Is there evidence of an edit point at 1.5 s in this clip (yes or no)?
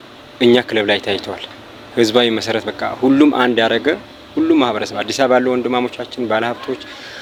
no